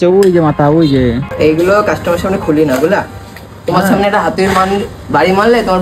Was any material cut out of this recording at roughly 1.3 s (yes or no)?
yes